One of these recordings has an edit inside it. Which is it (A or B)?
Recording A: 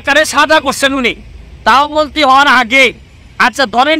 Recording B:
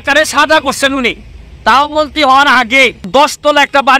B